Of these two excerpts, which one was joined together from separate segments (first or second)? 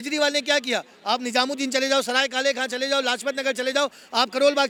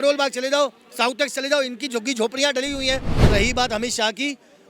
second